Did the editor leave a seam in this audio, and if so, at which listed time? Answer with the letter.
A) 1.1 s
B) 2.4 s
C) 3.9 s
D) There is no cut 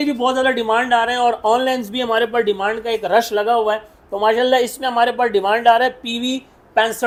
D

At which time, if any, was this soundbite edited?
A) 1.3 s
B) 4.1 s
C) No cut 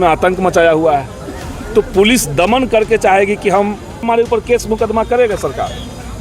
B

